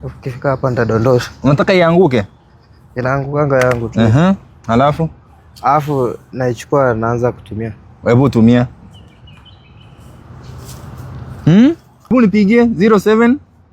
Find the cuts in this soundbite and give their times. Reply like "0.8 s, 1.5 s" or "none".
12.1 s

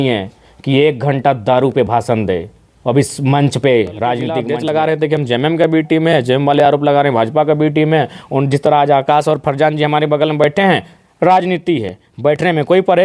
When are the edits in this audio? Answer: 4.4 s

